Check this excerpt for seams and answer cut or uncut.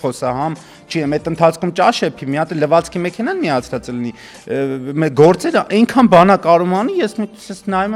uncut